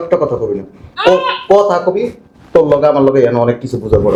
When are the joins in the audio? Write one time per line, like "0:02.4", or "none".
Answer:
none